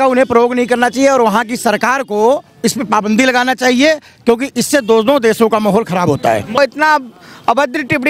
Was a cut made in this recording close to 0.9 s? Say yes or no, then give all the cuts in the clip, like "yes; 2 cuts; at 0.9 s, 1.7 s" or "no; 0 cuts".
no; 1 cut; at 6.6 s